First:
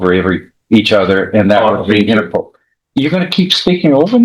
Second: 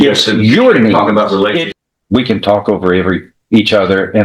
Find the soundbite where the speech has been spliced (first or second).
second